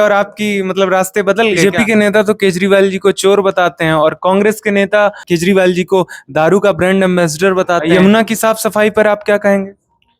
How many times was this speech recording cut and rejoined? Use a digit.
3